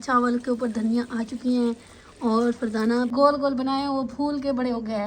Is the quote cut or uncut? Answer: cut